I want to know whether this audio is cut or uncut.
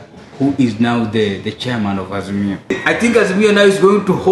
cut